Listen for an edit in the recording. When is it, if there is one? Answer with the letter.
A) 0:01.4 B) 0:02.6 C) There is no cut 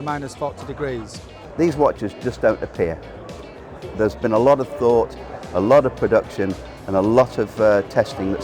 A